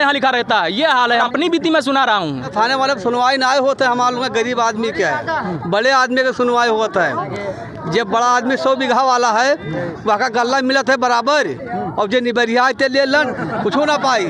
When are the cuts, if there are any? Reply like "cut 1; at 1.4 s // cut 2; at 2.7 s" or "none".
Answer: cut 1; at 1.2 s // cut 2; at 2.5 s

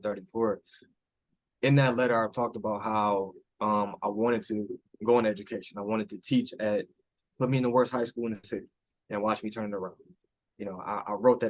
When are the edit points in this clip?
none

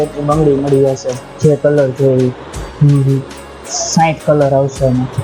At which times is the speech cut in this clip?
none

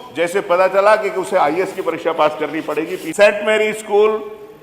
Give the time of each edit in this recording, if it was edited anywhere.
cut 1; at 3.0 s

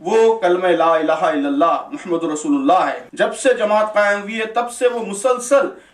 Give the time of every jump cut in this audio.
cut 1; at 3.0 s

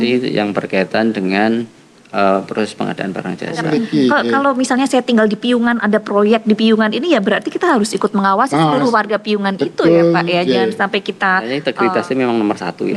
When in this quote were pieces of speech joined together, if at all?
cut 1; at 3.7 s // cut 2; at 11.5 s

